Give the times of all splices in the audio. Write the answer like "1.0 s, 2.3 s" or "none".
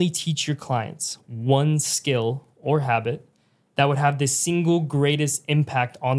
none